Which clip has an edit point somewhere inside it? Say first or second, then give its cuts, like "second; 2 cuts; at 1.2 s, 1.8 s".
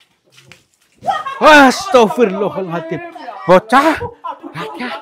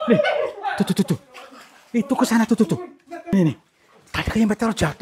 second; 1 cut; at 3.3 s